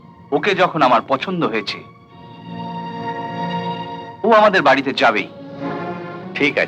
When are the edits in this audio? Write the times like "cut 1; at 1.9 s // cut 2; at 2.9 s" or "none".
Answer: none